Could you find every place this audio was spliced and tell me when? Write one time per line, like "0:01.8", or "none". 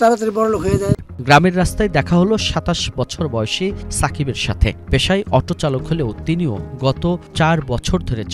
none